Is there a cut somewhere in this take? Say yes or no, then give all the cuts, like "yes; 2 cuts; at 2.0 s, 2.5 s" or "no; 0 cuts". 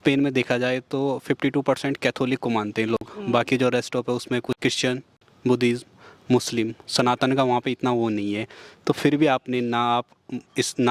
no; 0 cuts